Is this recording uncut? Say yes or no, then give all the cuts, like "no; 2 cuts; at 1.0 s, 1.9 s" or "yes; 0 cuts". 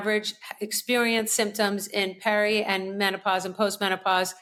yes; 0 cuts